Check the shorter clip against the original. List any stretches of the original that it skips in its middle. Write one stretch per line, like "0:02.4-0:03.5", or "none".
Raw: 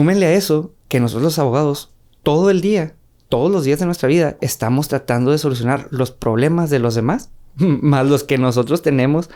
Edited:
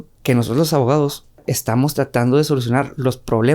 0:02.1-0:04.4